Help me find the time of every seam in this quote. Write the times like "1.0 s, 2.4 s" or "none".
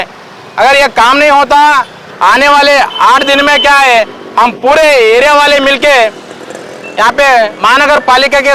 2.1 s